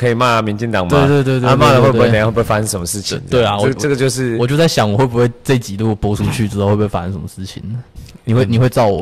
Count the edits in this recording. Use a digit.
0